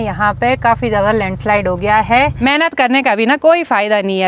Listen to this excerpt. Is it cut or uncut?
cut